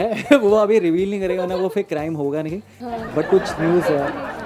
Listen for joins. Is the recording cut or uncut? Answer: uncut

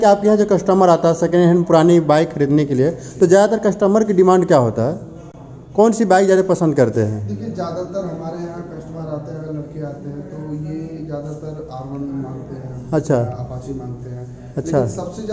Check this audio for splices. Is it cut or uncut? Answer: uncut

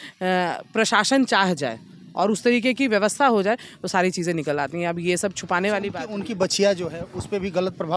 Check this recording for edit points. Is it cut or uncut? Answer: uncut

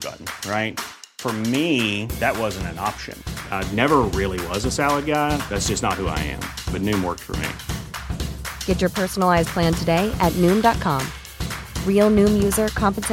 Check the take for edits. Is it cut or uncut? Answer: uncut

